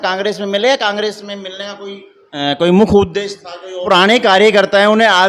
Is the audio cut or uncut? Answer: cut